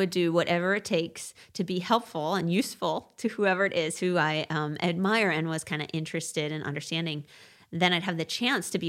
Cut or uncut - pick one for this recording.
uncut